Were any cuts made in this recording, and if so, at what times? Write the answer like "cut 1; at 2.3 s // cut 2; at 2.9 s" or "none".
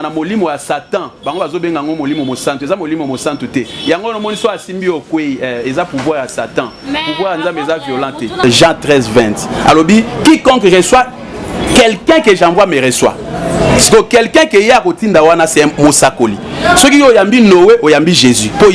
cut 1; at 8.4 s